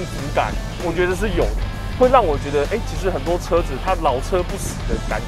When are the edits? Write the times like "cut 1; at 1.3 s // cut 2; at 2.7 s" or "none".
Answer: none